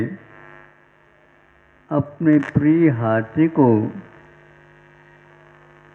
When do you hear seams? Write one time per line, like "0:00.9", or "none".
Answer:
none